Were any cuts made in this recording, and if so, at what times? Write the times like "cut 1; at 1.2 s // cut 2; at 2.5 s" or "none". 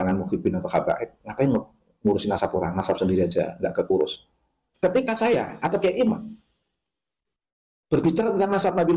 none